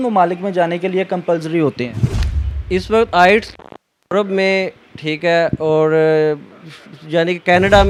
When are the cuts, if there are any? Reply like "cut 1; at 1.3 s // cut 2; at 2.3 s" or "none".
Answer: none